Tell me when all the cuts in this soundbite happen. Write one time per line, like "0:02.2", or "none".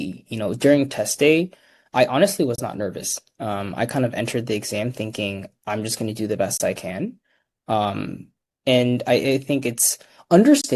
none